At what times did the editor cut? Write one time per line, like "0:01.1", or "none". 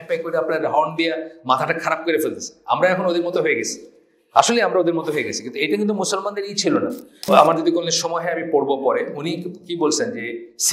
0:07.1